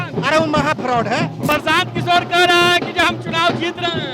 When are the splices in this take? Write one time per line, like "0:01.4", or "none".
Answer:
0:01.4